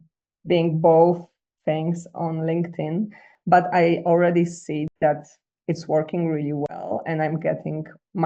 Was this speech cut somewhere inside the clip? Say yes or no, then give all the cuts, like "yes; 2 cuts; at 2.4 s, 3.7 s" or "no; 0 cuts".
yes; 1 cut; at 3.2 s